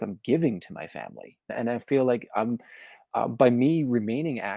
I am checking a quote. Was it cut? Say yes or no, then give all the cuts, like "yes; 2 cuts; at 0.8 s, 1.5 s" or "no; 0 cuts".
yes; 1 cut; at 1.5 s